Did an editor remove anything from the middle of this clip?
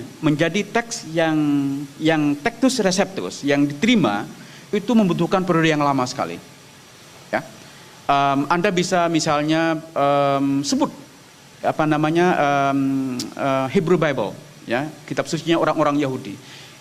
no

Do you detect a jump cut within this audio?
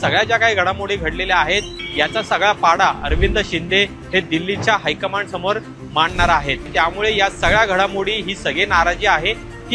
yes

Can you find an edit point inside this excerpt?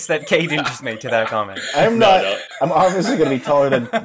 yes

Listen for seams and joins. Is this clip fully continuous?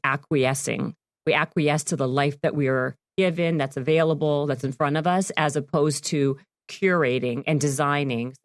yes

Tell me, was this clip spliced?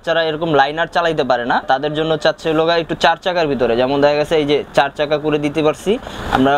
no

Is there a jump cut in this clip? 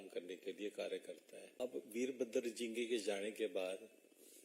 yes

